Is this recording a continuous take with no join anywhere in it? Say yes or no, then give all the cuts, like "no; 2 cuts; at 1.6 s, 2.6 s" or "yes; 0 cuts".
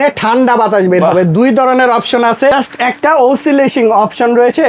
no; 1 cut; at 2.5 s